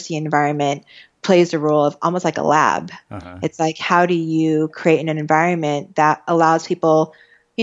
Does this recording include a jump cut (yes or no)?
no